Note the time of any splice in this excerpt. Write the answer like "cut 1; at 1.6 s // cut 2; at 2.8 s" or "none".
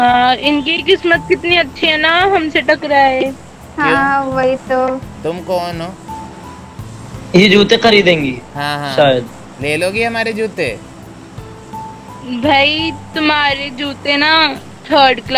none